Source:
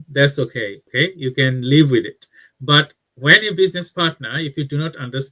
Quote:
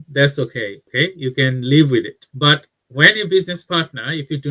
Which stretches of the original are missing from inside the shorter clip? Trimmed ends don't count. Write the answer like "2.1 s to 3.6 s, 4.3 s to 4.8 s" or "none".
2.2 s to 2.5 s